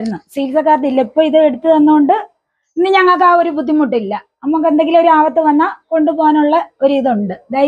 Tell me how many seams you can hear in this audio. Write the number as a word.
zero